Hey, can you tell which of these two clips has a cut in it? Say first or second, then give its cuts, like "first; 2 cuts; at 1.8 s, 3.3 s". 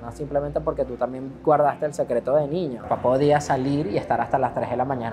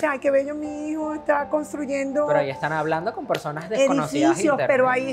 first; 1 cut; at 2.9 s